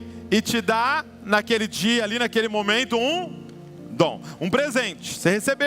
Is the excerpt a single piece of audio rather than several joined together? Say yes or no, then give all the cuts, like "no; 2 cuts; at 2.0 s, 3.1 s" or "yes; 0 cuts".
yes; 0 cuts